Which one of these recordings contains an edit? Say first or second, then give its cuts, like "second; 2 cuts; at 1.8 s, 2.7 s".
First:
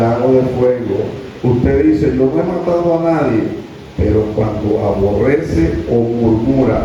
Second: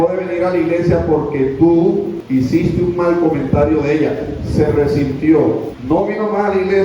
second; 2 cuts; at 2.2 s, 5.7 s